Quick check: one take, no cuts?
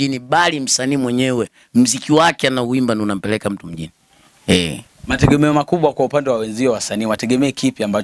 yes; 0 cuts

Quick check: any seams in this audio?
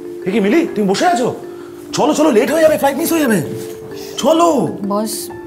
no; 0 cuts

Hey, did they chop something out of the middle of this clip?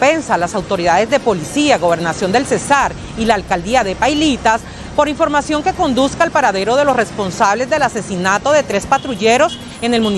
no; 0 cuts

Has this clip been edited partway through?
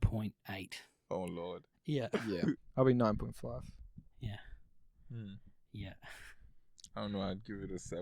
yes; 1 cut; at 2.7 s

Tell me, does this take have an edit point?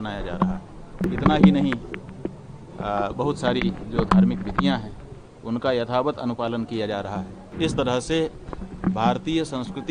yes; 2 cuts; at 0.9 s, 7.4 s

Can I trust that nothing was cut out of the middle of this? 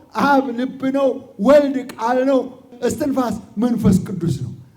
no; 1 cut; at 2.7 s

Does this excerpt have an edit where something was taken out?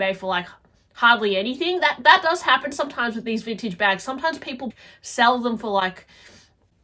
yes; 1 cut; at 4.9 s

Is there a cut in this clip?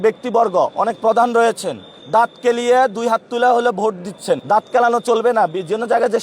yes; 1 cut; at 4.4 s

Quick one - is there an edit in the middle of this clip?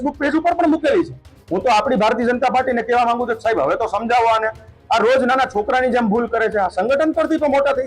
yes; 1 cut; at 1.3 s

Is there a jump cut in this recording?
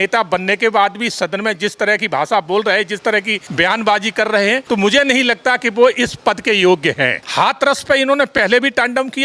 yes; 3 cuts; at 3.4 s, 4.6 s, 7.2 s

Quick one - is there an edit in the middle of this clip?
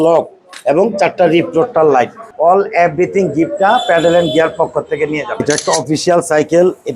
yes; 2 cuts; at 2.2 s, 5.3 s

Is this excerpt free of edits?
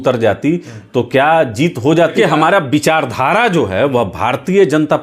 no; 1 cut; at 2.1 s

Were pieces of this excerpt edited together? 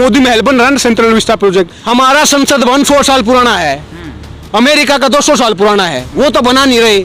yes; 1 cut; at 1.8 s

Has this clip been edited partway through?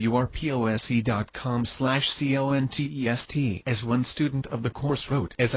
yes; 1 cut; at 1.3 s

